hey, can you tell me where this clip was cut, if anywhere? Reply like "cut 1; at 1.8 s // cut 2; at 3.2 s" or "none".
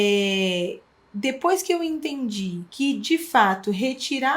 cut 1; at 2.6 s